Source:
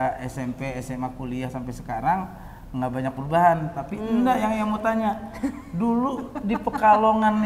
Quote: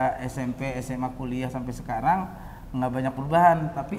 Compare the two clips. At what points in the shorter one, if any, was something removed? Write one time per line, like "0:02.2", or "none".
none